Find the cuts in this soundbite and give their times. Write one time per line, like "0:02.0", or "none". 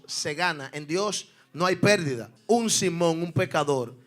0:02.3